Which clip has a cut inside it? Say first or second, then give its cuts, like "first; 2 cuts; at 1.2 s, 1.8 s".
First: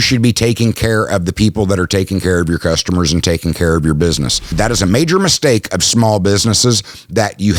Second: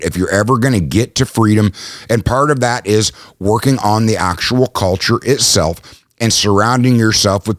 first; 1 cut; at 4.5 s